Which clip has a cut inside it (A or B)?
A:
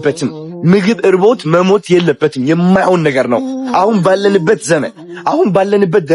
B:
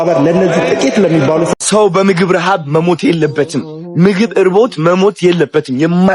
B